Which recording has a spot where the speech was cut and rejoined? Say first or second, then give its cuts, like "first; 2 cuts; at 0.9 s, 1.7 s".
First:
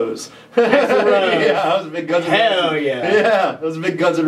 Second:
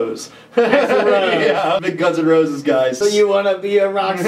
second; 2 cuts; at 1.9 s, 3.0 s